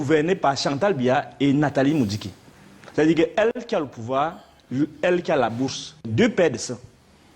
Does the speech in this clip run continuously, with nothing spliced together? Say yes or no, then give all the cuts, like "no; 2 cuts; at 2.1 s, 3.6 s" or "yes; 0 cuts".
no; 1 cut; at 6.1 s